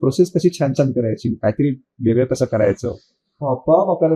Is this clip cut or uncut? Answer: uncut